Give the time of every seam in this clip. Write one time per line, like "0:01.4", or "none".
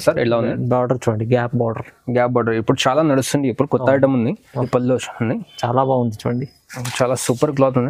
0:04.7